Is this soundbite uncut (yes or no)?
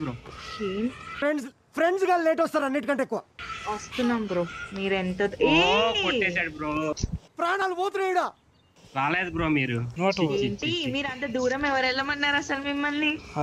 no